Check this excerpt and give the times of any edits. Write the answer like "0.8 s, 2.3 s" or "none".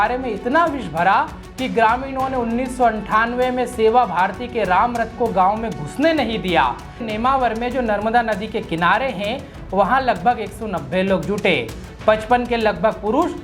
7.0 s